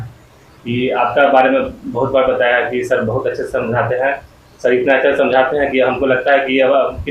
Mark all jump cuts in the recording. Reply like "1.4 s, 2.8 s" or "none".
none